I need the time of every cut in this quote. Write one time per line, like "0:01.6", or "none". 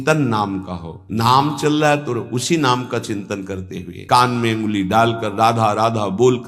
0:01.0
0:03.9